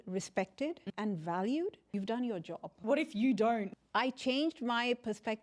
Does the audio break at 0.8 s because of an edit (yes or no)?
yes